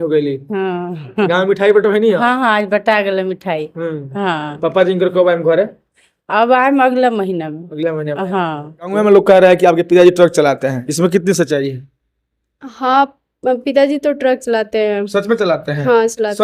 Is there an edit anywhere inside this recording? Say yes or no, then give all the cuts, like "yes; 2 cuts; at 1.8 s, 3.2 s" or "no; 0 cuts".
yes; 1 cut; at 8.9 s